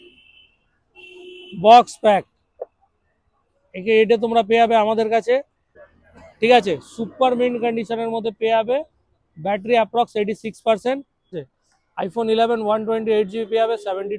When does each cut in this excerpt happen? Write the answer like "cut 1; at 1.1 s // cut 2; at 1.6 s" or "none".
cut 1; at 5.8 s // cut 2; at 11.5 s